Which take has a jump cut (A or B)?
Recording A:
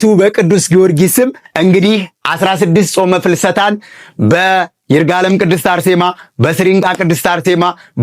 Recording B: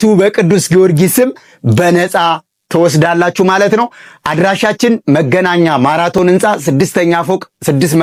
A